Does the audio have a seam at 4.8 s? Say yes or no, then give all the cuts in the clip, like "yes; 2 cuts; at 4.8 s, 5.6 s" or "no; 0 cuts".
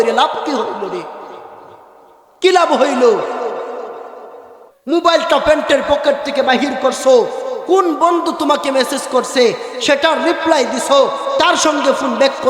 yes; 1 cut; at 4.8 s